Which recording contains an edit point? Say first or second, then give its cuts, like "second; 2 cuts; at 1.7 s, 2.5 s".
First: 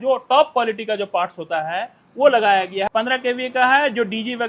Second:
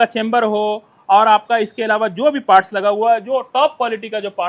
first; 1 cut; at 2.9 s